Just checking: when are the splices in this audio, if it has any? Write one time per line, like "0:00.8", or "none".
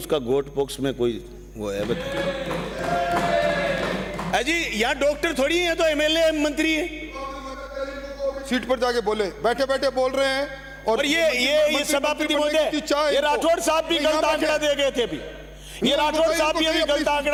none